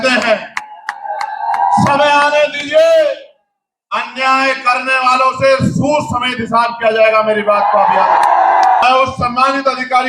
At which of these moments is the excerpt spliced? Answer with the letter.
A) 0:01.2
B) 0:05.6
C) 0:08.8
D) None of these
C